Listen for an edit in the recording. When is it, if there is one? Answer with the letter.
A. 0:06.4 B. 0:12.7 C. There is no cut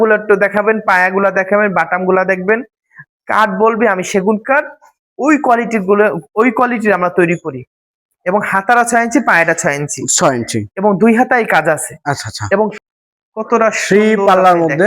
B